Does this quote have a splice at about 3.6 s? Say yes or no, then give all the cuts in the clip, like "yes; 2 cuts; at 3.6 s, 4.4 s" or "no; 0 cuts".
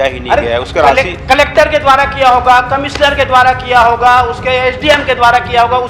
no; 0 cuts